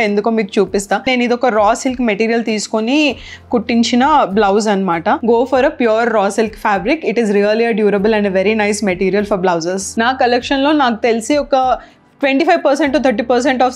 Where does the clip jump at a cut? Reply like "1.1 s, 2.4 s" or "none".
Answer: 1.1 s, 5.2 s, 9.8 s